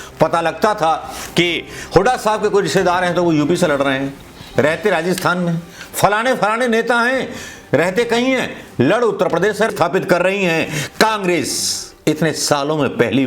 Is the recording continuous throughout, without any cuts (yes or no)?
no